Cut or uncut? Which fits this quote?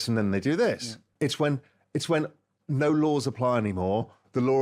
cut